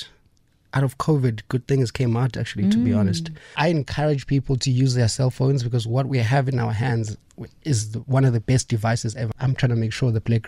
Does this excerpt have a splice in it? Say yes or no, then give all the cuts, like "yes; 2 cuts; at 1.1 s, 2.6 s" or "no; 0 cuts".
yes; 2 cuts; at 3.5 s, 9.3 s